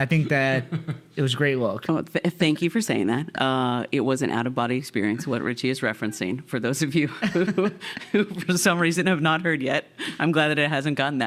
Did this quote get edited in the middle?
no; 0 cuts

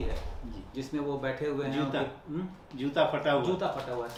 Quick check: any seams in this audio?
no; 0 cuts

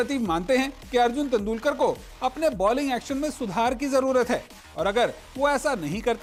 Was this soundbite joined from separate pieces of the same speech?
no; 0 cuts

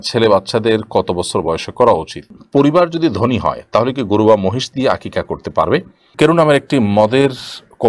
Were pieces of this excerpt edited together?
yes; 2 cuts; at 2.3 s, 6.1 s

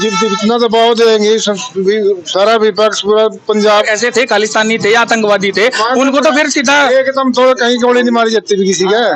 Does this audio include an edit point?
yes; 1 cut; at 3.9 s

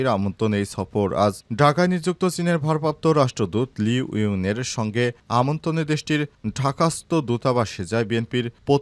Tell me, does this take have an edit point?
no; 0 cuts

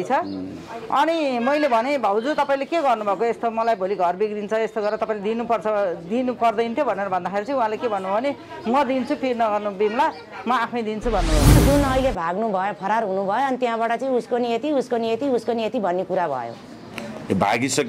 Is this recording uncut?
no; 1 cut; at 11.5 s

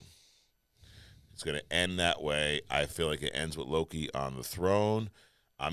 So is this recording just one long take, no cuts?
yes; 0 cuts

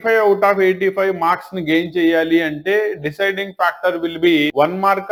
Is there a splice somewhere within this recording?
no; 0 cuts

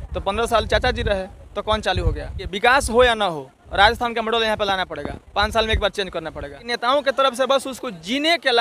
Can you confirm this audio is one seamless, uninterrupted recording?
no; 2 cuts; at 2.5 s, 6.7 s

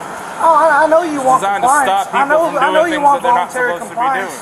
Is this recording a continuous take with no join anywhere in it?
yes; 0 cuts

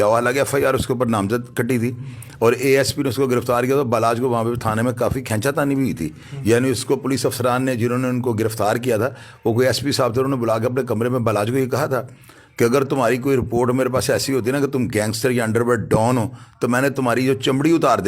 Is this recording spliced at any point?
no; 0 cuts

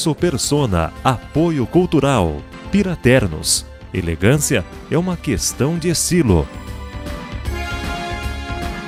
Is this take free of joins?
yes; 0 cuts

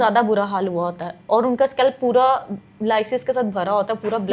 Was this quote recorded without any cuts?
yes; 0 cuts

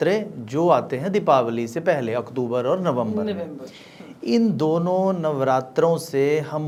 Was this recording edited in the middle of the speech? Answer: no; 0 cuts

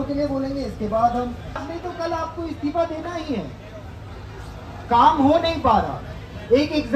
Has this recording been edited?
yes; 1 cut; at 1.7 s

